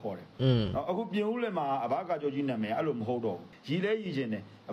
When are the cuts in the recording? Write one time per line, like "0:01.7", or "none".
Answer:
0:03.5